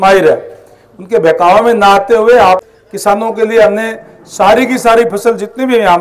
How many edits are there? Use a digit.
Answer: 1